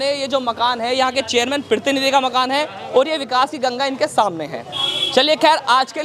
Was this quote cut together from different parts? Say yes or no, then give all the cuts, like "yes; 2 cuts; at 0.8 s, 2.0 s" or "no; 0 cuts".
no; 0 cuts